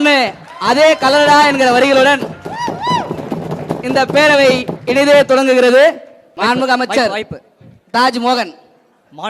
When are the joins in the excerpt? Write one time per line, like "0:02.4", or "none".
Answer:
0:06.2